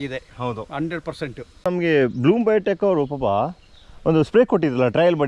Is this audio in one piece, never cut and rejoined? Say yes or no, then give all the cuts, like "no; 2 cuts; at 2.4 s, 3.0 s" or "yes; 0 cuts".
no; 1 cut; at 1.6 s